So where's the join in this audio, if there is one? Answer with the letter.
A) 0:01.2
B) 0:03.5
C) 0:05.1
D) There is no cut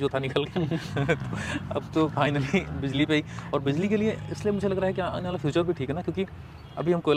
D